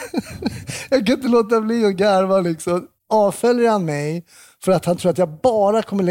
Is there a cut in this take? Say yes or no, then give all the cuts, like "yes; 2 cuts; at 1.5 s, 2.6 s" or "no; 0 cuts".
yes; 1 cut; at 2.9 s